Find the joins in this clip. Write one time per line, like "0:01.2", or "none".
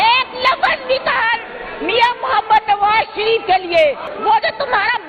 0:04.1